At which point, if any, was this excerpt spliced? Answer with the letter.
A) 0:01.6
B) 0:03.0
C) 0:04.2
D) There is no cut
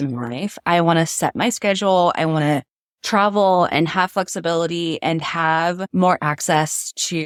D